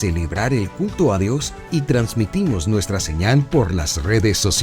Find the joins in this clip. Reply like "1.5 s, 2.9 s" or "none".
none